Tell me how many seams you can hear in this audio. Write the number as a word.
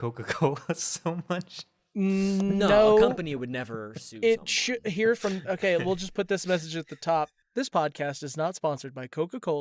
one